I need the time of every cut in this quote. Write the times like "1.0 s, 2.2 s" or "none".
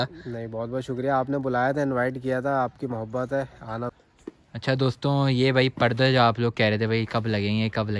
3.9 s